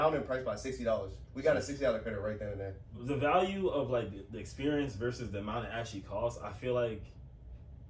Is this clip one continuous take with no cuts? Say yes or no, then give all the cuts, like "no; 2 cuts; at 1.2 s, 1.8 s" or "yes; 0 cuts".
yes; 0 cuts